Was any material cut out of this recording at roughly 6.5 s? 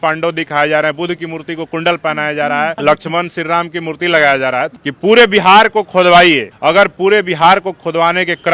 yes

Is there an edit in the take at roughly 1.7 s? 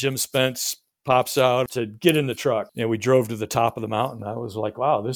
yes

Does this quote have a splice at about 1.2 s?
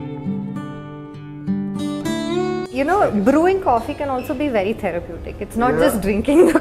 no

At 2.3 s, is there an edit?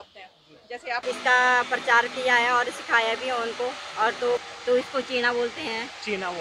no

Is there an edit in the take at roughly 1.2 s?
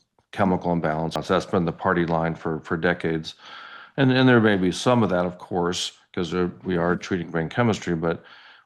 yes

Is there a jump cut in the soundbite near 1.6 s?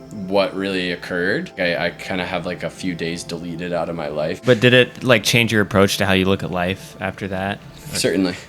yes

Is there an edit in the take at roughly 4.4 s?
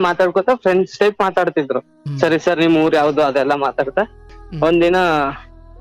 yes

